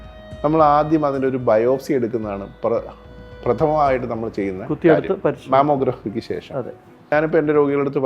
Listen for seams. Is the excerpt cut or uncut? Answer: cut